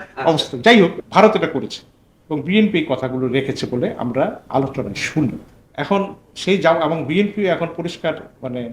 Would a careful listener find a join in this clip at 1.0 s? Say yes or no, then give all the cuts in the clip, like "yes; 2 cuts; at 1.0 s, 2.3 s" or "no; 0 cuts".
yes; 2 cuts; at 1.0 s, 5.5 s